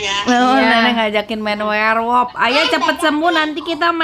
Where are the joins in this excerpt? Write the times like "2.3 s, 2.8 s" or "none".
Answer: none